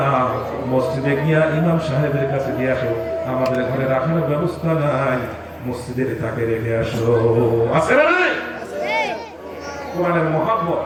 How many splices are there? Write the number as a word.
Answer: zero